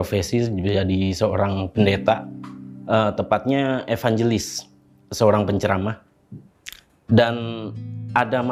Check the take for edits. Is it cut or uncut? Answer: uncut